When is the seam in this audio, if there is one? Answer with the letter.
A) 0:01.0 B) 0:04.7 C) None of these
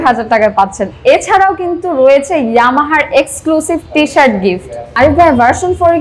B